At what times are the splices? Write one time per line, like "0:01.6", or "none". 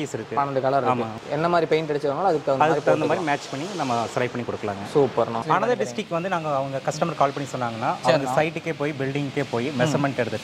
0:01.2
0:05.4